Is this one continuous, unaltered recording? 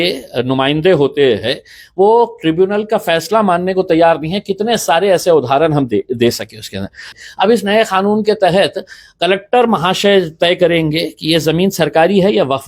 no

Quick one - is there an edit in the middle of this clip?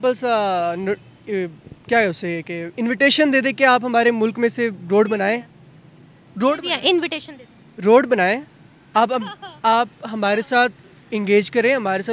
no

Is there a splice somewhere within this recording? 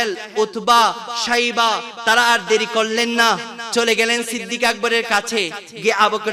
no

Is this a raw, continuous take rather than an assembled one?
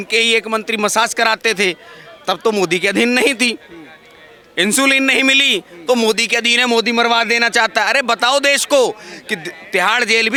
yes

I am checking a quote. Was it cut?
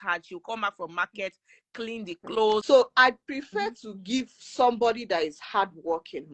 no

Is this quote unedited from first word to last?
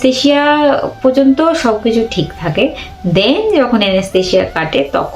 yes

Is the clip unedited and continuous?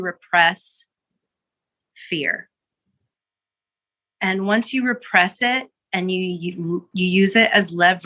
yes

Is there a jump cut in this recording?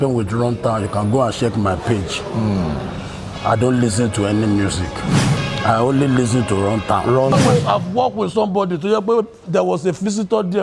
yes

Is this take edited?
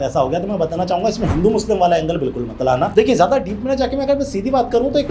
yes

